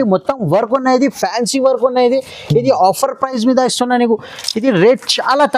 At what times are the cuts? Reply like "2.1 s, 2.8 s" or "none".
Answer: none